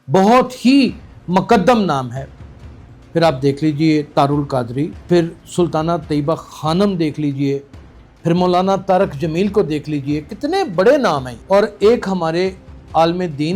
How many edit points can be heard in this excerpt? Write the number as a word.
zero